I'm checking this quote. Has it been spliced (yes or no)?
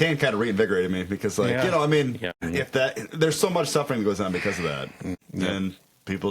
yes